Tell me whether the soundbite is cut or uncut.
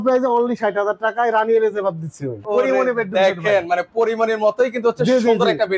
cut